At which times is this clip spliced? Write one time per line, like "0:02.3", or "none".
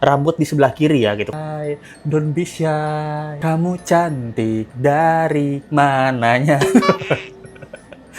0:01.3